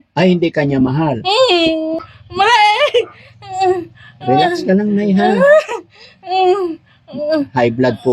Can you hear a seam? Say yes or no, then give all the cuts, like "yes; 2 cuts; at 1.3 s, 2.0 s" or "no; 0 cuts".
yes; 1 cut; at 1.9 s